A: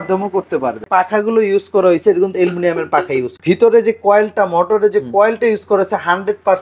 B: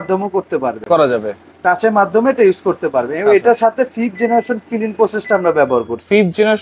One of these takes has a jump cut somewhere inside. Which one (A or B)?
A